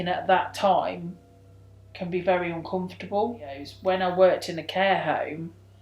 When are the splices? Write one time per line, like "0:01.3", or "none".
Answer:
0:03.7